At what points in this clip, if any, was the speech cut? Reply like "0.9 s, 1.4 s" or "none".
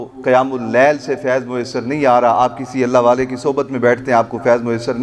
none

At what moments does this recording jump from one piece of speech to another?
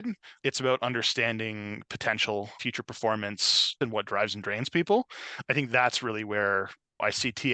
2.6 s, 3.8 s

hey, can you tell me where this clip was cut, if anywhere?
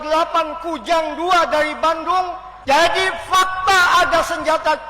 2.5 s

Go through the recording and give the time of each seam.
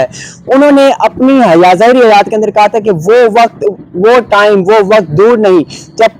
none

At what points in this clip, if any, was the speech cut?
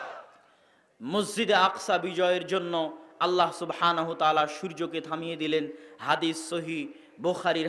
none

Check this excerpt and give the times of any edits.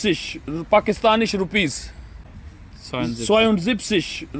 none

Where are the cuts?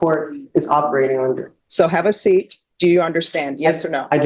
1.6 s, 2.6 s

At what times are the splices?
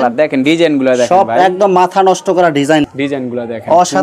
2.9 s

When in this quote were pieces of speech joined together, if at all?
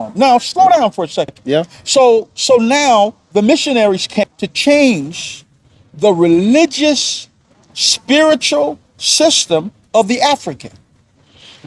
1.4 s, 4.1 s

